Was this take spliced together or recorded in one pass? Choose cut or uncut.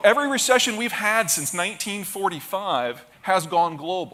uncut